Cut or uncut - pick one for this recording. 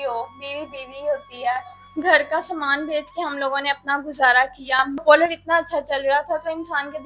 cut